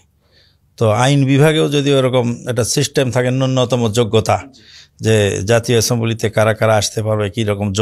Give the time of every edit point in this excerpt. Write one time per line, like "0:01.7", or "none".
none